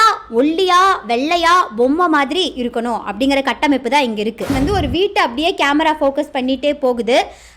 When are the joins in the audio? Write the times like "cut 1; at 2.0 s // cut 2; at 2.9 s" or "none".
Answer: cut 1; at 4.5 s